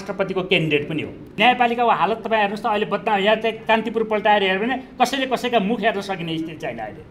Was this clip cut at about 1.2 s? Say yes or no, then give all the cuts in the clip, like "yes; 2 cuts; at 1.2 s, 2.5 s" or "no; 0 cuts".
yes; 1 cut; at 1.2 s